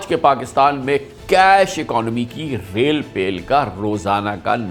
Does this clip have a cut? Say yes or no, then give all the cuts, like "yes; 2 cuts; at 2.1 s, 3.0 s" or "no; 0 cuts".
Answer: no; 0 cuts